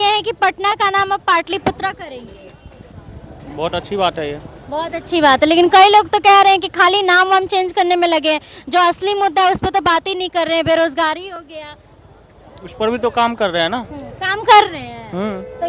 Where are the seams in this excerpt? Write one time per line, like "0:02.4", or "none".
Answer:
none